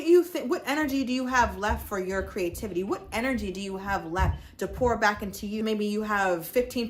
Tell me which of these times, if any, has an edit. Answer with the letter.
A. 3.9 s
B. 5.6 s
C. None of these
B